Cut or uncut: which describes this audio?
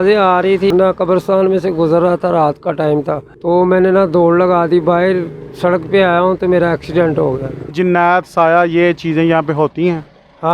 cut